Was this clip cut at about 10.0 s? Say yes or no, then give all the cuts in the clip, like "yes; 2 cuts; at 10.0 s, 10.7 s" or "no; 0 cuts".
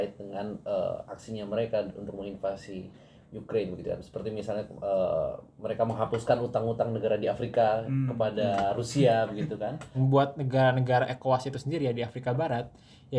yes; 1 cut; at 10.0 s